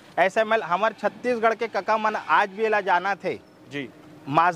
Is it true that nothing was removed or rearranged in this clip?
yes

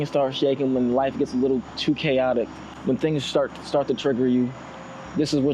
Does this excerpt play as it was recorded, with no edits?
yes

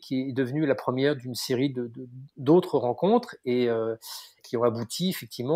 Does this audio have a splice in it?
no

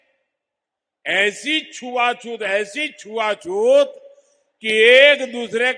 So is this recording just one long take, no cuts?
yes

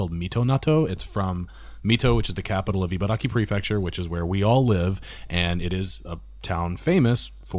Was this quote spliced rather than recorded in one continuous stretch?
no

